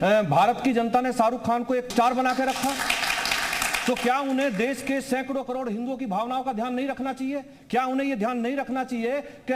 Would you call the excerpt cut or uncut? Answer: cut